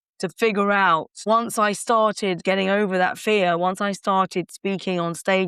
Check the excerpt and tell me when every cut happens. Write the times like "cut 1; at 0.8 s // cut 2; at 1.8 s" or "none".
cut 1; at 1.2 s // cut 2; at 2.4 s

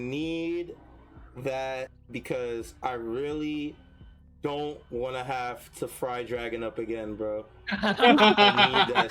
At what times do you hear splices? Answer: cut 1; at 2.0 s

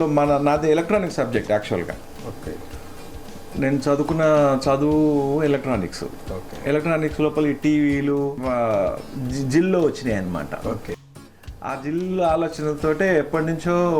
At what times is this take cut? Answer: cut 1; at 8.4 s

